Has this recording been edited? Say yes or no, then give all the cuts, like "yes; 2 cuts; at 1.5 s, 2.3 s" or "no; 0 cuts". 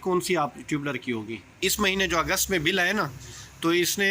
yes; 1 cut; at 1.5 s